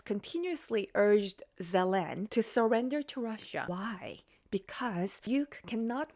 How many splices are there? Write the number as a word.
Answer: three